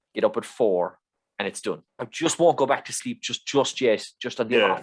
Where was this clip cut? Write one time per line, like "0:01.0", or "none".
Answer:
0:02.0